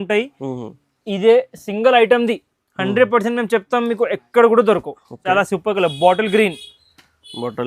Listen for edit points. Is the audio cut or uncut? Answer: cut